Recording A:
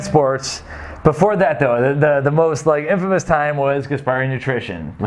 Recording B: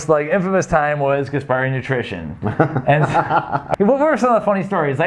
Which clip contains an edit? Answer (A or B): B